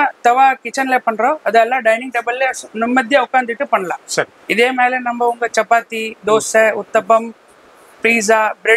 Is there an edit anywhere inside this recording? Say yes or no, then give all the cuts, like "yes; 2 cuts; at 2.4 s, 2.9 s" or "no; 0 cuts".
no; 0 cuts